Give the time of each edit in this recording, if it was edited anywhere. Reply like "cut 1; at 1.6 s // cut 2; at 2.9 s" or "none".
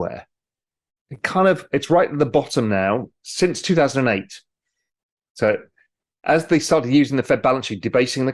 none